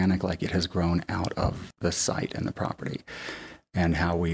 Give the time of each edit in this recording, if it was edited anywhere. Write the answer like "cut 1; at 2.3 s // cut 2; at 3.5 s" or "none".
cut 1; at 1.6 s